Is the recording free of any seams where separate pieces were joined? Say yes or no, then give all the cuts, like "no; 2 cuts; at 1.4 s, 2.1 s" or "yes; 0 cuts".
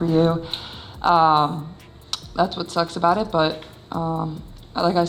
yes; 0 cuts